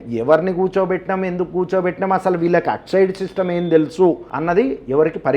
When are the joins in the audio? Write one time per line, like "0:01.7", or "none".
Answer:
0:04.3